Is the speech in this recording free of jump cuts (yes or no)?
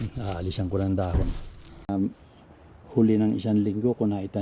no